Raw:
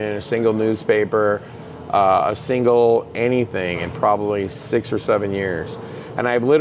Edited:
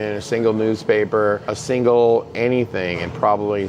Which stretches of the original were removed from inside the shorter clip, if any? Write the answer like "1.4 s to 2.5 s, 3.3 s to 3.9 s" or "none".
1.6 s to 2.4 s

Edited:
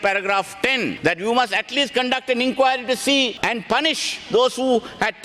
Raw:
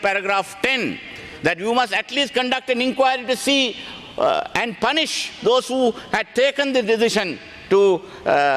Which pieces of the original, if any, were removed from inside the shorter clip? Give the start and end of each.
0.9 s to 1.3 s, 3.8 s to 4.5 s

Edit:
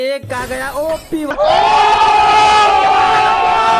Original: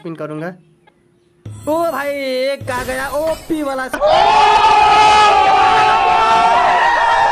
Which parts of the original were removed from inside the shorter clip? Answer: 3.7 s to 3.9 s

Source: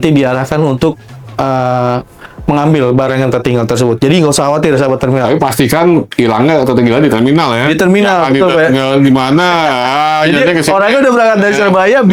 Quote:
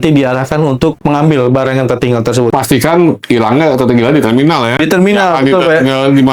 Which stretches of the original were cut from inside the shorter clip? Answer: 1.0 s to 2.4 s, 4.0 s to 5.4 s

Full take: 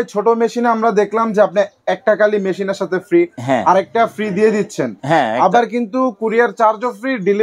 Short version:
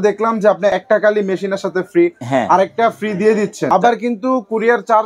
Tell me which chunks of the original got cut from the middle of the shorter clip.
1.7 s to 1.9 s, 4.9 s to 5.4 s

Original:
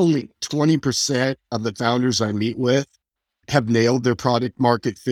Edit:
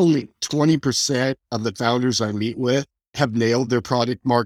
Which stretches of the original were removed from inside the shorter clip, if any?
3.0 s to 3.3 s

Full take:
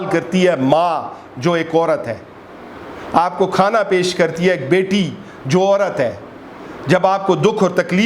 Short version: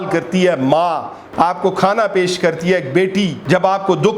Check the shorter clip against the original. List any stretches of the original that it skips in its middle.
1.2 s to 2.9 s, 5.1 s to 6.8 s

